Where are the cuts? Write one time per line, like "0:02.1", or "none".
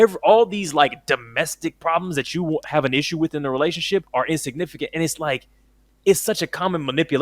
0:04.1